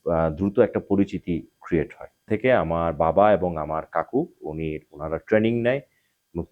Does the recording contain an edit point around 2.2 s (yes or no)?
yes